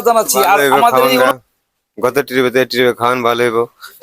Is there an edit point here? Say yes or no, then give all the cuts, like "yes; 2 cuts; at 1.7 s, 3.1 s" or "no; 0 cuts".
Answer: yes; 1 cut; at 1.3 s